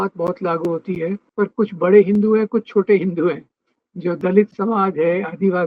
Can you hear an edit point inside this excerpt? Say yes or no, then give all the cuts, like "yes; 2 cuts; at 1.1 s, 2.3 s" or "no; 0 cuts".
yes; 1 cut; at 1.2 s